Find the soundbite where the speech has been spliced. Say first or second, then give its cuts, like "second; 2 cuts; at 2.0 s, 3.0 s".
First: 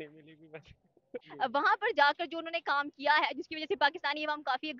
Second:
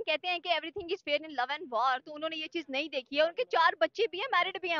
first; 1 cut; at 1.2 s